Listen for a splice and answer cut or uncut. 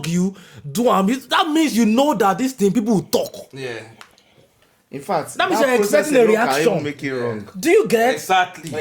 uncut